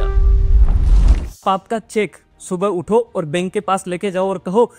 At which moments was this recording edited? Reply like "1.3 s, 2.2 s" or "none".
1.4 s